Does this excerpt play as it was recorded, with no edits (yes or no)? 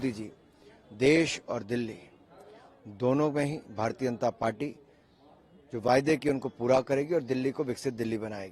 yes